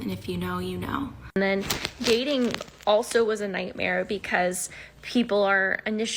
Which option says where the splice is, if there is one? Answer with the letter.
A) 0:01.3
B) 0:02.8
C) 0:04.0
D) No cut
A